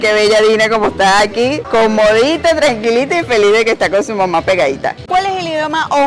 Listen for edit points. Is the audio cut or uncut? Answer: cut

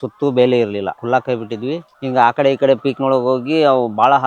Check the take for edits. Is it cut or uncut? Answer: cut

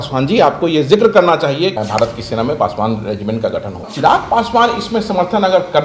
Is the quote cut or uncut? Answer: cut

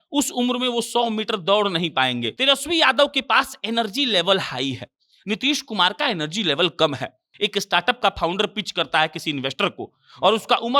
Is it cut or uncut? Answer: cut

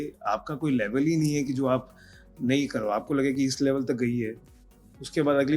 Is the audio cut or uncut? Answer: uncut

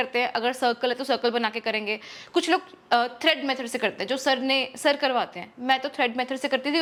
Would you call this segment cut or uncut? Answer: uncut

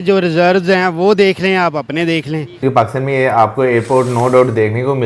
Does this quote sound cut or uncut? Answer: cut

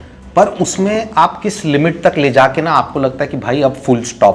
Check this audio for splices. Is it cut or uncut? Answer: uncut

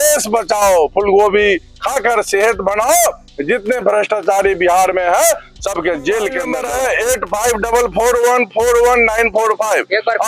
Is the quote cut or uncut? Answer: cut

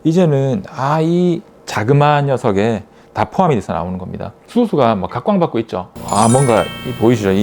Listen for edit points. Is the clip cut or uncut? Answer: cut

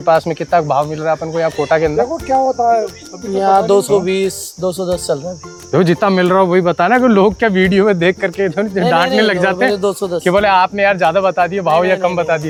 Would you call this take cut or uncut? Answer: uncut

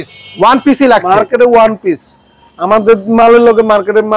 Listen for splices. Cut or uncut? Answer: uncut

